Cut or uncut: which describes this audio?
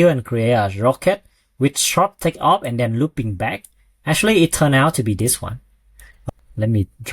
cut